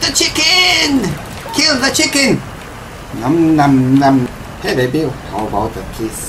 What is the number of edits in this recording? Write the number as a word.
one